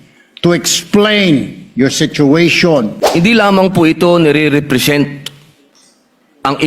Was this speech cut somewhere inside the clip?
yes; 1 cut; at 3.0 s

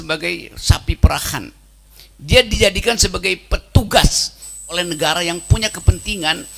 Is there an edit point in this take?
yes; 1 cut; at 4.7 s

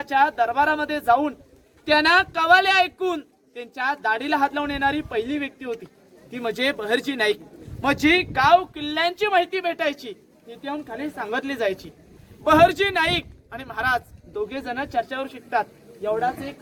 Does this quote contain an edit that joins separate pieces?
no; 0 cuts

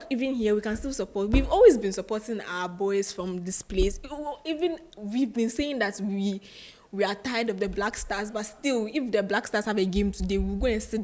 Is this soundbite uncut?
yes; 0 cuts

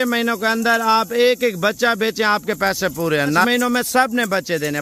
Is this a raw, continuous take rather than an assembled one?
no; 1 cut; at 3.4 s

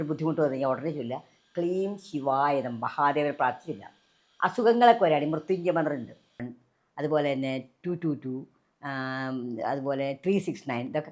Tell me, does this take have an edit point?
yes; 1 cut; at 6.4 s

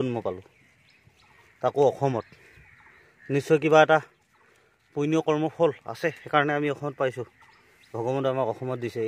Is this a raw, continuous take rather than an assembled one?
yes; 0 cuts

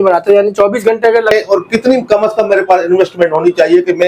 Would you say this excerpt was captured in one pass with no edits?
no; 1 cut; at 1.3 s

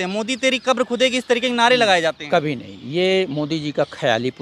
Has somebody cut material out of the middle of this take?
no; 0 cuts

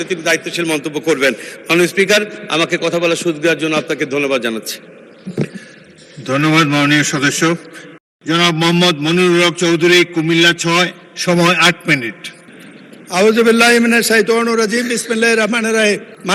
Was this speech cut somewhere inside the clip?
no; 0 cuts

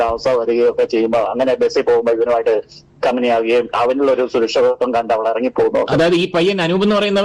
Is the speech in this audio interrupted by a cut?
no; 0 cuts

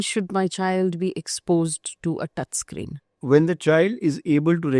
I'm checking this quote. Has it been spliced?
yes; 1 cut; at 3.0 s

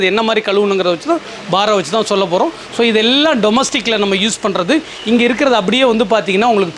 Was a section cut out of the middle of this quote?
no; 0 cuts

